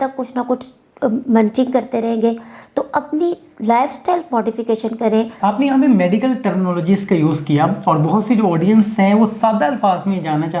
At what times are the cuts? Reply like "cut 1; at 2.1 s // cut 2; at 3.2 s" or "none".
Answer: cut 1; at 5.3 s